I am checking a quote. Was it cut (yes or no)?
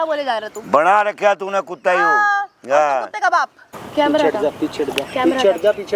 yes